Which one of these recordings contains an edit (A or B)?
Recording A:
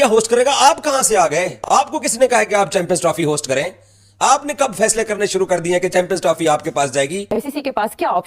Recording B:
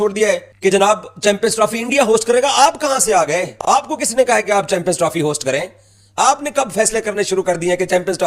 A